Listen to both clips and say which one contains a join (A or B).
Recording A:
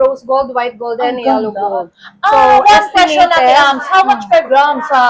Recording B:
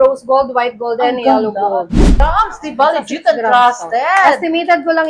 B